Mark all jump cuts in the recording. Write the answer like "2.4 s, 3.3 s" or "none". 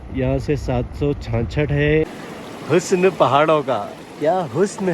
2.1 s